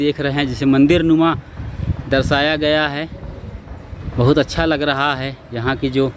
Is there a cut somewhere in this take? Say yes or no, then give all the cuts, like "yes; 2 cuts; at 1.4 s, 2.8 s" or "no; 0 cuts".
no; 0 cuts